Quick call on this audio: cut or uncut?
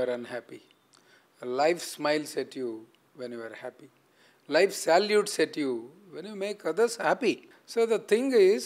cut